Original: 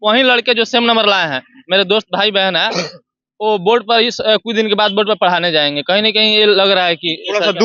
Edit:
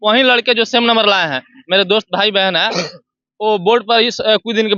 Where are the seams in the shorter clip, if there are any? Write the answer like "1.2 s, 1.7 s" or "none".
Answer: none